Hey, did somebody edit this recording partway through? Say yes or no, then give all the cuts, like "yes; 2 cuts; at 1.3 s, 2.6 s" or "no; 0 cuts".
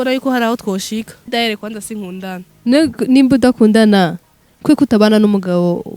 yes; 2 cuts; at 1.3 s, 2.5 s